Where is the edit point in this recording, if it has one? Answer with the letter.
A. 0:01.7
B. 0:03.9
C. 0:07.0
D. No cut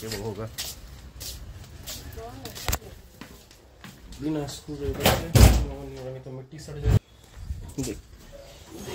C